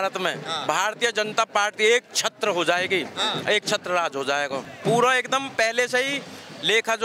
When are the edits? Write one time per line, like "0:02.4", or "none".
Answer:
0:04.7